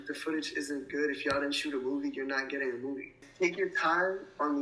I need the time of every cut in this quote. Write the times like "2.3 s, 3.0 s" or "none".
3.2 s